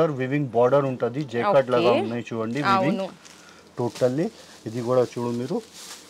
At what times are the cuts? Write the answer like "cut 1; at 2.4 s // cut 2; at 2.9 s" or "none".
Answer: none